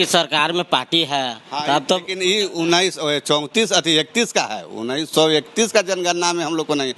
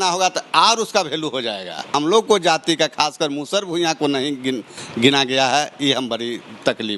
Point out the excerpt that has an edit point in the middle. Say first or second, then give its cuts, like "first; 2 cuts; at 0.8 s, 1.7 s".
second; 1 cut; at 1.9 s